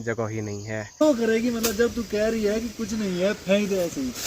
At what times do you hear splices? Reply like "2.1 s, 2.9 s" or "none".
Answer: 1.0 s